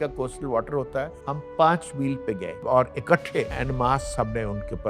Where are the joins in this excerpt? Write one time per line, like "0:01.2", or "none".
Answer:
0:02.6
0:03.5